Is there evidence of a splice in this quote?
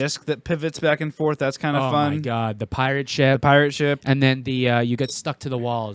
no; 0 cuts

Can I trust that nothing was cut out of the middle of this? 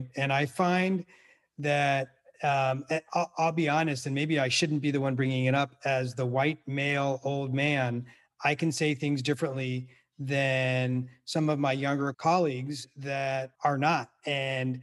no; 2 cuts; at 12.2 s, 13.5 s

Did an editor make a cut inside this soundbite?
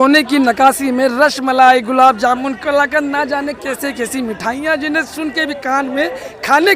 no; 0 cuts

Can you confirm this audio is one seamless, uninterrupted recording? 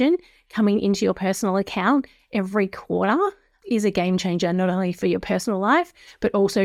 yes; 0 cuts

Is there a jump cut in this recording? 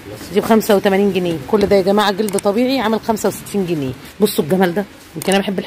yes; 2 cuts; at 1.4 s, 4.0 s

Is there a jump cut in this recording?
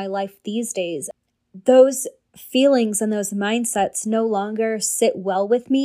yes; 1 cut; at 1.1 s

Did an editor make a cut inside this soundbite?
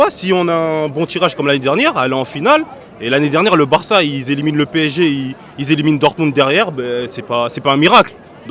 no; 0 cuts

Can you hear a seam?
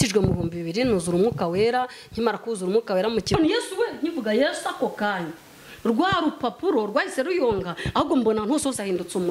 yes; 1 cut; at 3.3 s

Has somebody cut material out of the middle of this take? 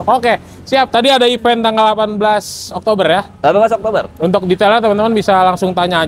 no; 0 cuts

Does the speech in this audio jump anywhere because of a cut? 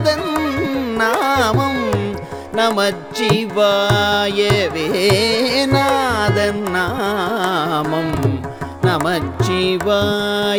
no; 0 cuts

